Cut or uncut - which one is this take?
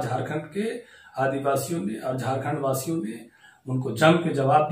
uncut